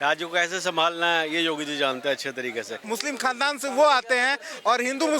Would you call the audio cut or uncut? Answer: cut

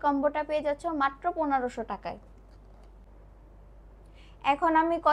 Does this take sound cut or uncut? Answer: uncut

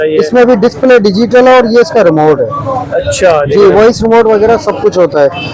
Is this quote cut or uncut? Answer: uncut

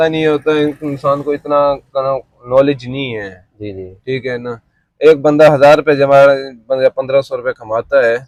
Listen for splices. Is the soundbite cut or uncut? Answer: uncut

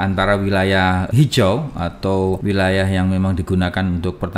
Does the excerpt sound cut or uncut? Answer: cut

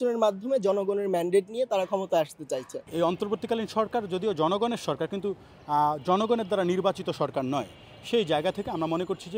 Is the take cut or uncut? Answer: cut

